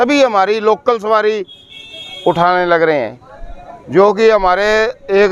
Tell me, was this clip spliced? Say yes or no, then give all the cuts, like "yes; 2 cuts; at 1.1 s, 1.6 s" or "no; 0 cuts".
no; 0 cuts